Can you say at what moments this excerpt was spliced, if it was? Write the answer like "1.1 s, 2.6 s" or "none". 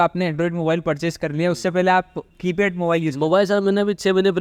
none